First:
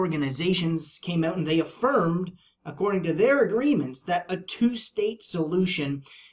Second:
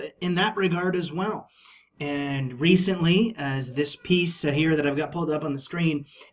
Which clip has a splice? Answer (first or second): first